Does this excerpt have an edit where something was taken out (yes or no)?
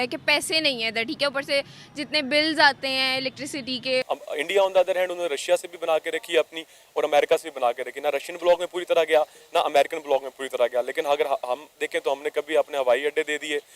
yes